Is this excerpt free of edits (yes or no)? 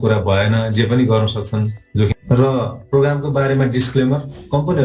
no